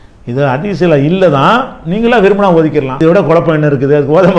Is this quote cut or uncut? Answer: cut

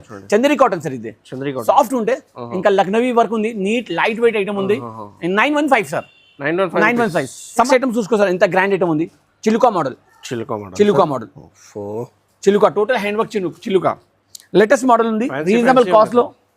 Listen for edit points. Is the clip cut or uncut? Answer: cut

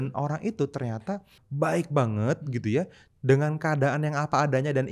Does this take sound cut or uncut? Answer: cut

